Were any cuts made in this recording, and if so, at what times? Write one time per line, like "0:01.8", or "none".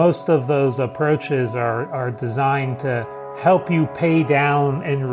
none